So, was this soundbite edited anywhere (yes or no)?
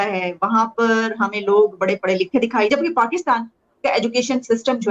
yes